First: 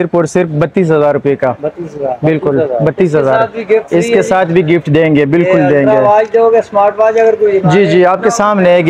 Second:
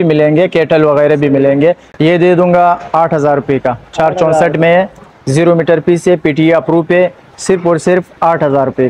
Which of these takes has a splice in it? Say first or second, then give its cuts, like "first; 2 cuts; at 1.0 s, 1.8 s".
second; 1 cut; at 1.9 s